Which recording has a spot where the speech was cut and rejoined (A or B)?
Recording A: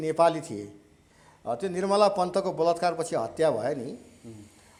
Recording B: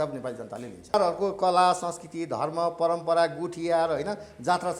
B